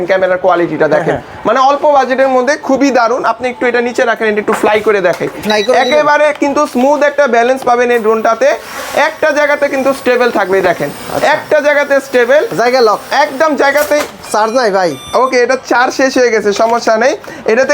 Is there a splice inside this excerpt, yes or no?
no